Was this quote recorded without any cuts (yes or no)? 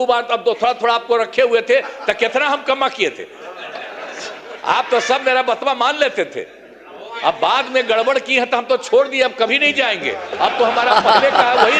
yes